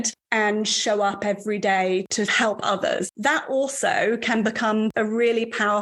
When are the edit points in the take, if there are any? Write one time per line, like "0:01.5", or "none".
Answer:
0:02.1
0:03.1
0:04.9

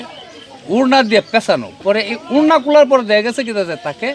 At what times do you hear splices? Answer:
none

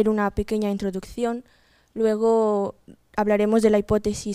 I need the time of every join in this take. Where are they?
0:03.2

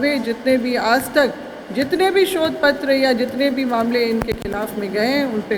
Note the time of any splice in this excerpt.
none

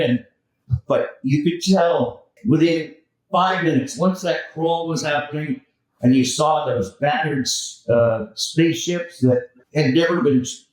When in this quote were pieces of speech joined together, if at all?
0:02.3
0:09.6

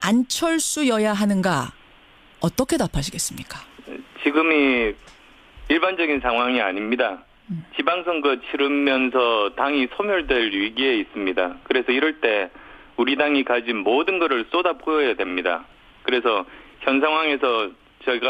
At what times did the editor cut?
0:09.6

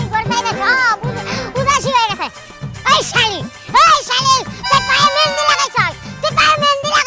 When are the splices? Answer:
none

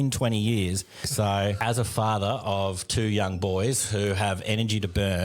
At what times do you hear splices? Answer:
0:01.3

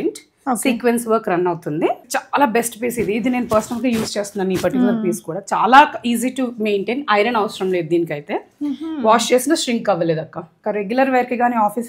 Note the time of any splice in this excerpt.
0:02.1
0:10.5

